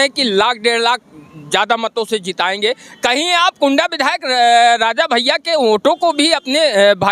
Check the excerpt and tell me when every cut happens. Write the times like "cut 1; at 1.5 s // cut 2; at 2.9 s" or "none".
none